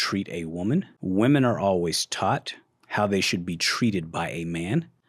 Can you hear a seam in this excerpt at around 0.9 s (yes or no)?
yes